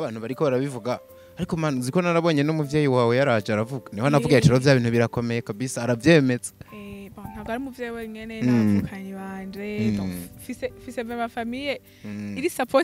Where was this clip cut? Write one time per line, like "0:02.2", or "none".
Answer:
none